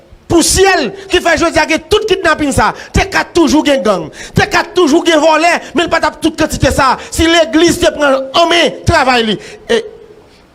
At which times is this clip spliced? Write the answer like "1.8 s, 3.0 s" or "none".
none